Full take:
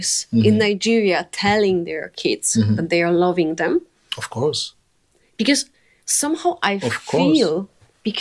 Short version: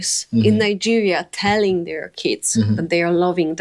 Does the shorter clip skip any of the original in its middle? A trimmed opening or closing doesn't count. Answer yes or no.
no